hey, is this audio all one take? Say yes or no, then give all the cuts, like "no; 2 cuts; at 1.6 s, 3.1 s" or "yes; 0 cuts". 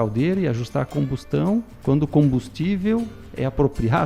no; 1 cut; at 1.7 s